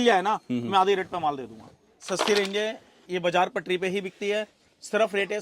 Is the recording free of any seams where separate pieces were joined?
no; 1 cut; at 2.1 s

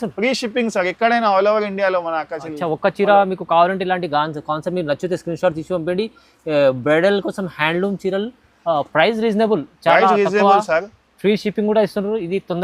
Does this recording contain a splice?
no; 0 cuts

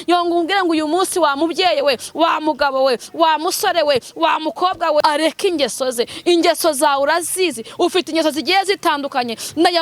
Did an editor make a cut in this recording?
yes; 1 cut; at 5.0 s

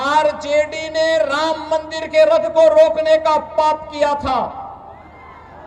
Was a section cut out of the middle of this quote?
no; 0 cuts

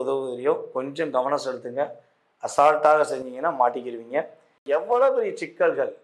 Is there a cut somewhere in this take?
yes; 1 cut; at 4.6 s

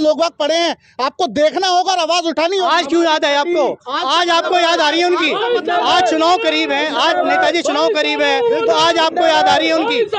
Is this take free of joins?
yes; 0 cuts

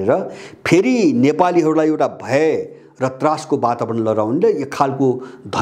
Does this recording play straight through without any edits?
yes; 0 cuts

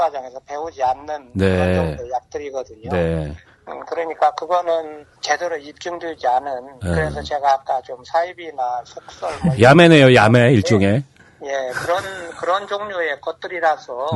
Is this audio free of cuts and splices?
yes; 0 cuts

